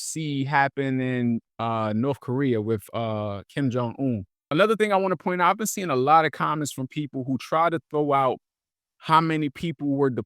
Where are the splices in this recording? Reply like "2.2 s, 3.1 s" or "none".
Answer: 4.3 s